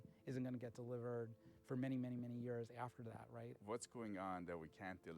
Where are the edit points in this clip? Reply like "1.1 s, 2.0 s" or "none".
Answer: 3.5 s

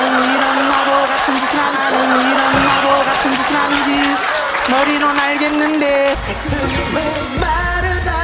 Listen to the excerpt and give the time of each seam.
1.8 s, 3.7 s

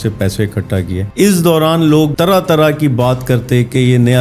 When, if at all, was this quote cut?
1.0 s, 2.1 s

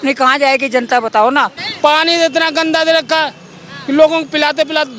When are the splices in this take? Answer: 1.6 s

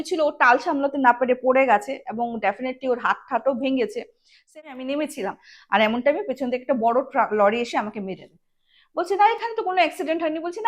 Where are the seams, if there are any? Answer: 4.5 s

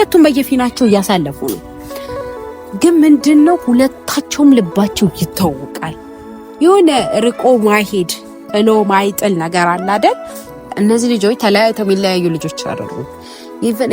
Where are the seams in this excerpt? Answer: 10.7 s

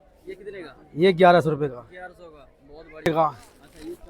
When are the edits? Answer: 3.1 s

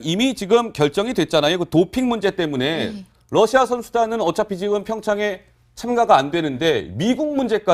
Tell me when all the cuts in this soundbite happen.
0.9 s

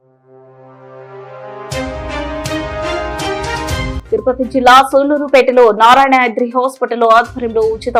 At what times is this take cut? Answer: none

